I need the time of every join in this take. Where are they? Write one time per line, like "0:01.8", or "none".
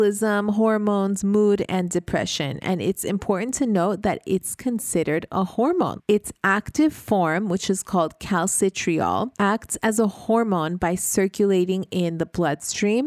0:06.0
0:09.3